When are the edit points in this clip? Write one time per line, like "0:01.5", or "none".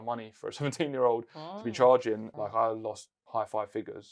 0:02.3
0:03.1